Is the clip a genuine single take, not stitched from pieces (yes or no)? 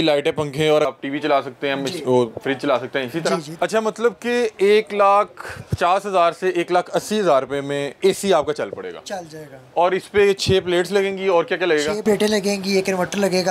no